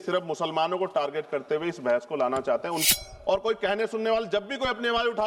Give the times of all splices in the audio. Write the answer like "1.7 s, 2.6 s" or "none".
2.8 s